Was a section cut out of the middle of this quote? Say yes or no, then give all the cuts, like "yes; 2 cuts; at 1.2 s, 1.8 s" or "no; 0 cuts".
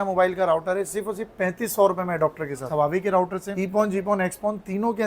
yes; 2 cuts; at 2.7 s, 3.5 s